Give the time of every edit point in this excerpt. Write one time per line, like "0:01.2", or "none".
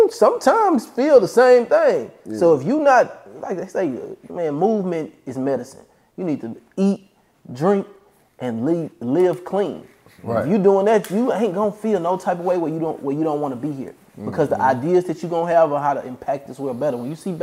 none